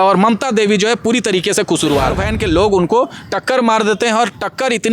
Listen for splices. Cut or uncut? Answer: cut